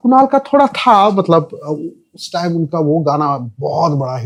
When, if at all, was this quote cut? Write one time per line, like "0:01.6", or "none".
none